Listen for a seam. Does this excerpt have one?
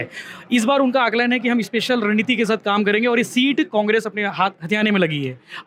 no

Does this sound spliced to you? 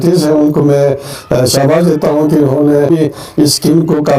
yes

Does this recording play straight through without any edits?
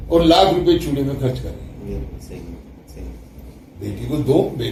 yes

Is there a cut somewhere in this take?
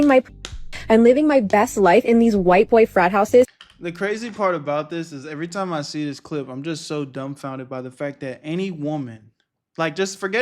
no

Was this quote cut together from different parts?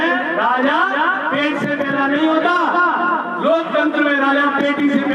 no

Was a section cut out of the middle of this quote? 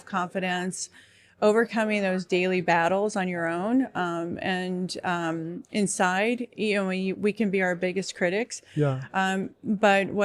no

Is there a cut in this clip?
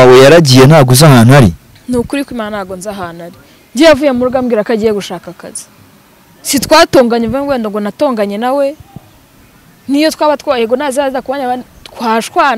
no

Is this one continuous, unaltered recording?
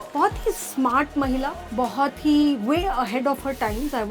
no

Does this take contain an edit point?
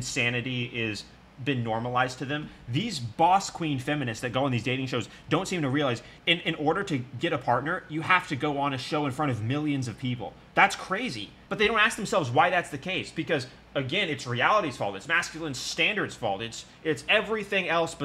no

